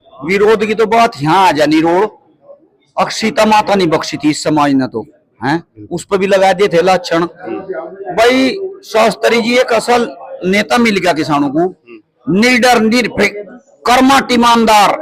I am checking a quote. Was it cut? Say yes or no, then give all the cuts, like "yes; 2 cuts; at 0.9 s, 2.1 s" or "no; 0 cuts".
no; 0 cuts